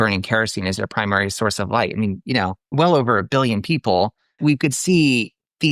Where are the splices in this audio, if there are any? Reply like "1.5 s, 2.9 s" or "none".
2.7 s, 4.4 s